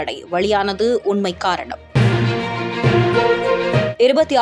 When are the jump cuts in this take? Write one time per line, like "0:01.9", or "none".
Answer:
none